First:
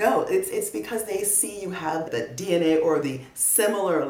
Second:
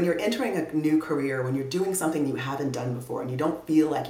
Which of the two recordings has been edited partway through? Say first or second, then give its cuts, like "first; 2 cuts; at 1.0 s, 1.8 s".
first; 1 cut; at 2.1 s